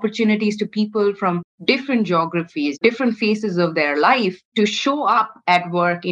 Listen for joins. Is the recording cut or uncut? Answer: cut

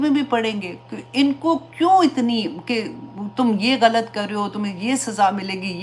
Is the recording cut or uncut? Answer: uncut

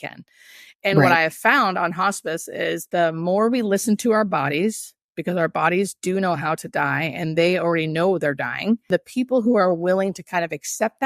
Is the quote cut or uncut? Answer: cut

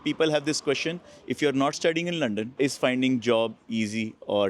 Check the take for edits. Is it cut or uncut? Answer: cut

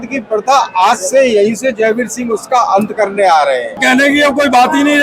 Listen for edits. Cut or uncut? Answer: cut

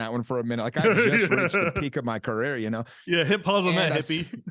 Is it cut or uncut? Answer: uncut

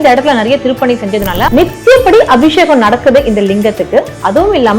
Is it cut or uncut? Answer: cut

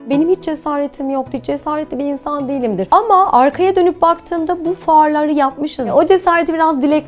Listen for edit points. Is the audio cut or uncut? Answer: cut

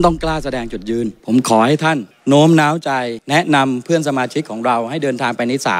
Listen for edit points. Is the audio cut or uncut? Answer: cut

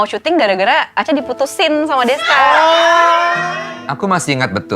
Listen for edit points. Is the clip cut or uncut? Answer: cut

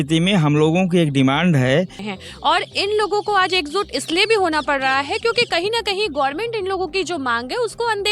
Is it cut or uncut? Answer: cut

